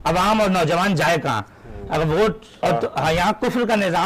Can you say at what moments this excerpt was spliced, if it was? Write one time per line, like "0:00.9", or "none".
0:02.6